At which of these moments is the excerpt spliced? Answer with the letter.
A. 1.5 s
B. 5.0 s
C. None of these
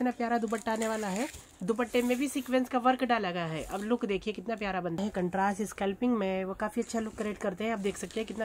B